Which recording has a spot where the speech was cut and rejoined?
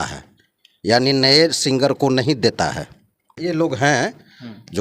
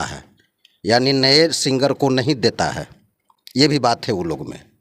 first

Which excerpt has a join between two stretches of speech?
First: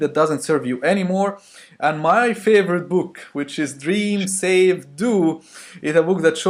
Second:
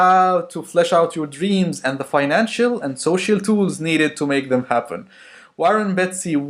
second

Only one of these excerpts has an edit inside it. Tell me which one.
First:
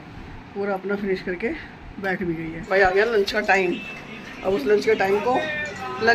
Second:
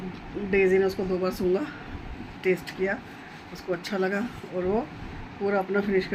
first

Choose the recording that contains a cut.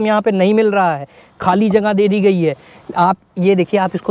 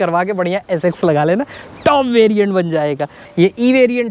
second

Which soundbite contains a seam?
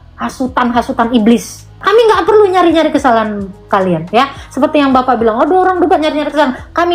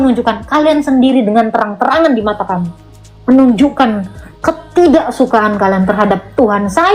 first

